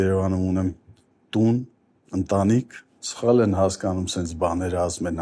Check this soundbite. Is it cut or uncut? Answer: uncut